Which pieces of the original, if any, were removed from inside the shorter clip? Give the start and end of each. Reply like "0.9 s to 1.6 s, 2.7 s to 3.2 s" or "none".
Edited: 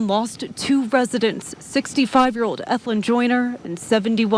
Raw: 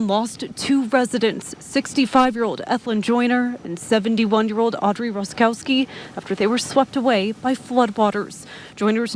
none